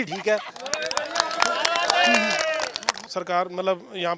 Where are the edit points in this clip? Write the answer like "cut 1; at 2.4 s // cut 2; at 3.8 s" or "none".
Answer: cut 1; at 3.0 s